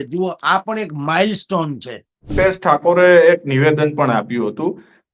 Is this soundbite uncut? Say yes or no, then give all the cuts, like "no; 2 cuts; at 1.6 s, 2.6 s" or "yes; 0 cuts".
no; 1 cut; at 2.3 s